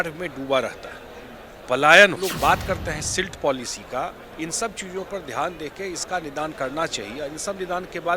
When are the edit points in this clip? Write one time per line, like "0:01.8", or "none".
0:02.2